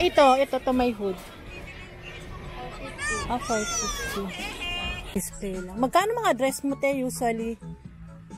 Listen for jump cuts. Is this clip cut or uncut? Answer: cut